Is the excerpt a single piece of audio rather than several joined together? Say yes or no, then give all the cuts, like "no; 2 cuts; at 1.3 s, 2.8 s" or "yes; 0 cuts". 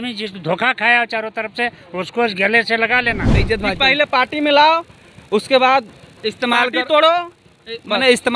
no; 1 cut; at 3.4 s